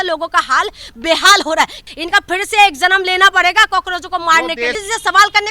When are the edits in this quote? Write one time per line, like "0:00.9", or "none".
0:01.8
0:04.8